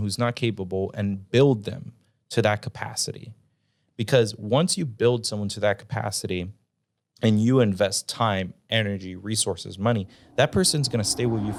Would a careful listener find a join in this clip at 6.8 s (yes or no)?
no